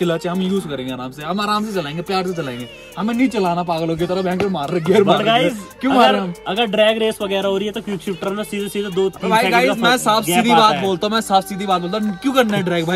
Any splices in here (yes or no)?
no